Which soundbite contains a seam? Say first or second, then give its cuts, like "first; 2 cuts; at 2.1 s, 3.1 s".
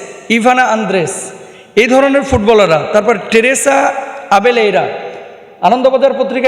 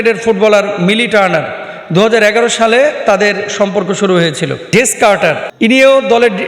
second; 2 cuts; at 4.7 s, 5.5 s